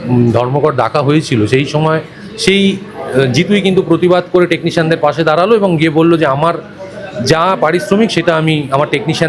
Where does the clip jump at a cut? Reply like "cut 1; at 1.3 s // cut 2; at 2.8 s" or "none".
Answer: none

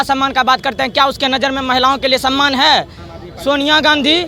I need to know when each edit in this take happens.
none

